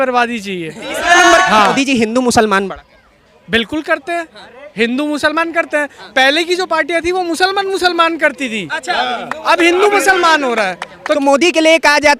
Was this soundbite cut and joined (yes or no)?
yes